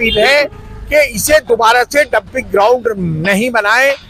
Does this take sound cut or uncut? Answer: uncut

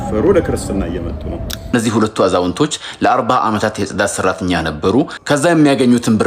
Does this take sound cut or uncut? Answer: cut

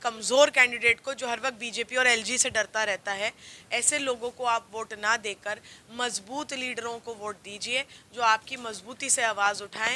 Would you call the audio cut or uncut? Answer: uncut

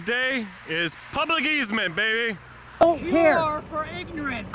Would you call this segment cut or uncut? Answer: cut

